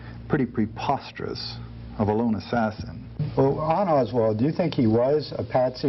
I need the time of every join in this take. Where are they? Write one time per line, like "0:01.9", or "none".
0:03.1